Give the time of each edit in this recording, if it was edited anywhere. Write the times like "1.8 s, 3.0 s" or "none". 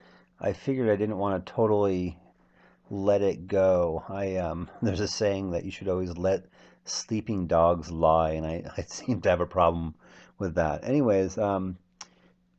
none